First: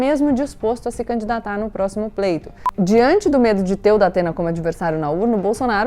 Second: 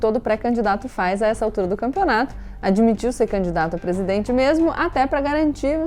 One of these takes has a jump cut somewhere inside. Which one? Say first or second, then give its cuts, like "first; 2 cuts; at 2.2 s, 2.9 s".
first; 1 cut; at 2.6 s